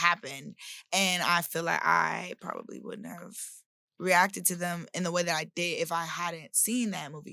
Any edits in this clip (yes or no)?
no